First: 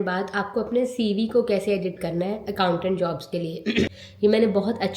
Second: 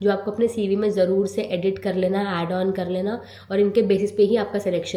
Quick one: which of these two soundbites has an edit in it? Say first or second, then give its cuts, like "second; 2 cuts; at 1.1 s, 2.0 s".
first; 1 cut; at 4.0 s